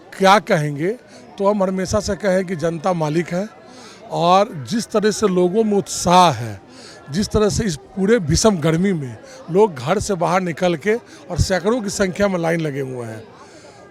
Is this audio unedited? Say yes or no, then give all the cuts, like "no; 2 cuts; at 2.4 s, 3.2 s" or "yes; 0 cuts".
yes; 0 cuts